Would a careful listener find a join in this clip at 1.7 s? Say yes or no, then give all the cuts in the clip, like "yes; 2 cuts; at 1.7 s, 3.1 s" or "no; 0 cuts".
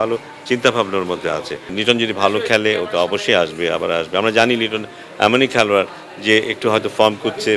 yes; 1 cut; at 1.7 s